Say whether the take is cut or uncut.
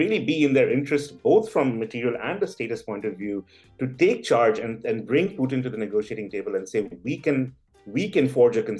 uncut